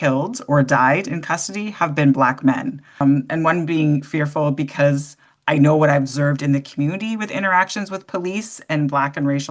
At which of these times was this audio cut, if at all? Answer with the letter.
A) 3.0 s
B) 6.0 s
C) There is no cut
A